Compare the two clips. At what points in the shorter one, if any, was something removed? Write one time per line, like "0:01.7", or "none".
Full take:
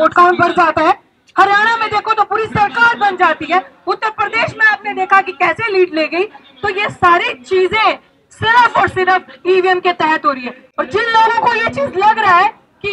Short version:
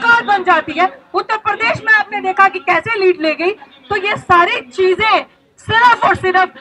none